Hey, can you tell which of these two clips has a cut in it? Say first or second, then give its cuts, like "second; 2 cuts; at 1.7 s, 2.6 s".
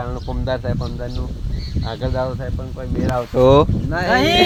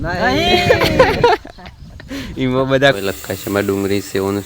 second; 1 cut; at 3.0 s